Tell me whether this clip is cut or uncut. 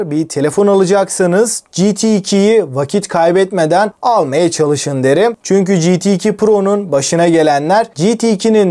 uncut